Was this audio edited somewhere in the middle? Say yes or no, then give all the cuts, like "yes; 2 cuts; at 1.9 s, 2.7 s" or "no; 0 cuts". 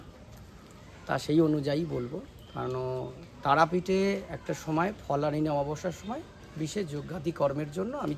no; 0 cuts